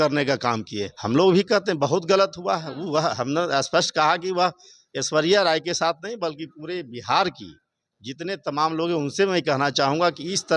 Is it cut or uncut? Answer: cut